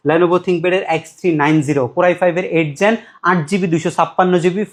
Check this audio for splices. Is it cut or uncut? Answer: uncut